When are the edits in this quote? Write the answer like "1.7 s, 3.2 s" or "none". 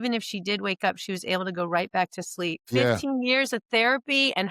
2.6 s